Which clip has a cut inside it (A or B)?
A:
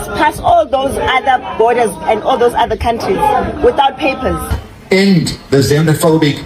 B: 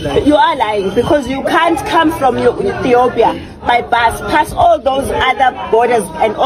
A